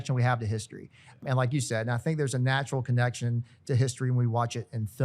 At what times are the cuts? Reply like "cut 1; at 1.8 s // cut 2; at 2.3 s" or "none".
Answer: cut 1; at 1.2 s